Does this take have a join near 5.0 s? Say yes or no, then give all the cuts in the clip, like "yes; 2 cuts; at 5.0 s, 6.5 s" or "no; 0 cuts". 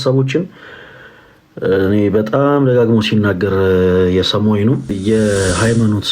yes; 1 cut; at 5.0 s